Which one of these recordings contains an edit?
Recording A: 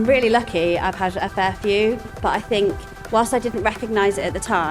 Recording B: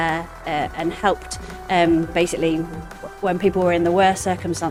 A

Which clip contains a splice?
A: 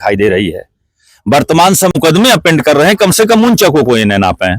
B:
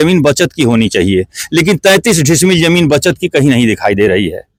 A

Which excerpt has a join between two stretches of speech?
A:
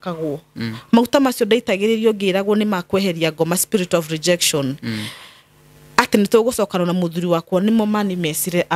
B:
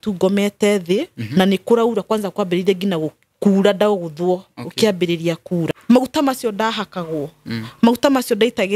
B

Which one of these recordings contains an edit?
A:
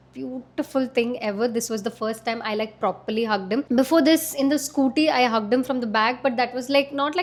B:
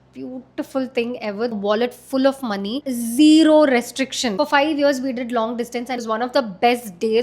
B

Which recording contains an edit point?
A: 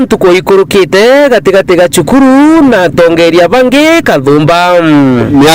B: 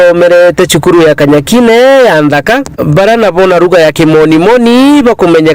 B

